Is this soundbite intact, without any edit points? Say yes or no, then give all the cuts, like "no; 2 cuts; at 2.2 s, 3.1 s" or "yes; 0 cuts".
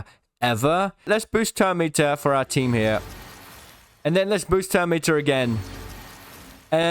no; 1 cut; at 1.0 s